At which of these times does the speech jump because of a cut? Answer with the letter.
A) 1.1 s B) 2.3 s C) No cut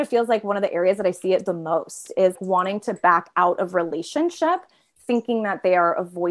B